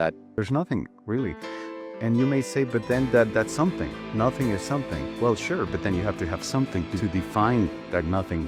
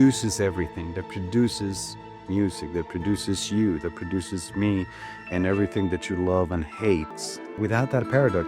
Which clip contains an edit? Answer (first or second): second